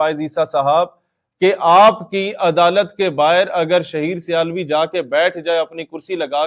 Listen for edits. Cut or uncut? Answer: uncut